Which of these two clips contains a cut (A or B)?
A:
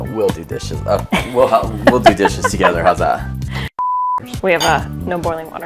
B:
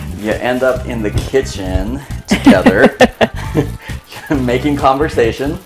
A